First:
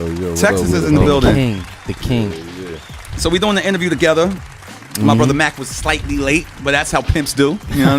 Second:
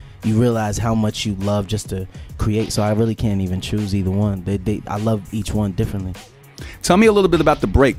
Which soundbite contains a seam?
first; 1 cut; at 1.7 s

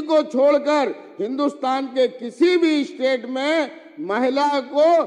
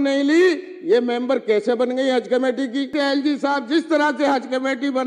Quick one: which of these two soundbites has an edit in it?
second; 1 cut; at 2.9 s

